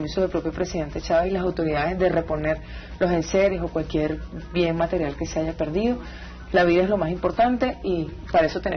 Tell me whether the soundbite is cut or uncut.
cut